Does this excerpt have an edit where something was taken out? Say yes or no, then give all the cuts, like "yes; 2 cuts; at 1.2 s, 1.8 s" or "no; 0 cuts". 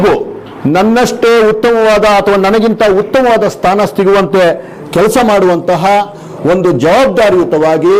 no; 0 cuts